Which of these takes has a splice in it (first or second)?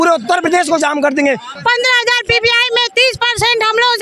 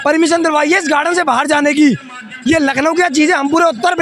first